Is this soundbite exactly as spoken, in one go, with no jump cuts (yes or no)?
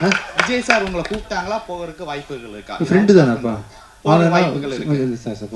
yes